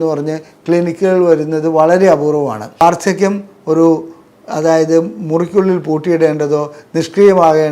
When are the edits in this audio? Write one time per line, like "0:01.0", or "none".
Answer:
0:02.8